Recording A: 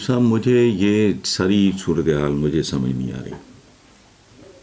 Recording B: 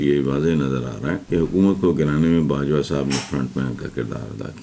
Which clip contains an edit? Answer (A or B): B